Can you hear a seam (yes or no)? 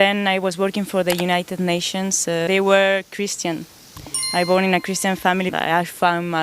yes